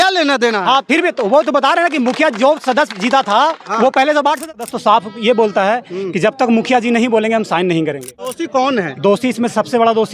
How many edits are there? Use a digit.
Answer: 2